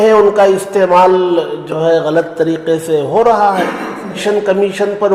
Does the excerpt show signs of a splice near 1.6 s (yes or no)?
no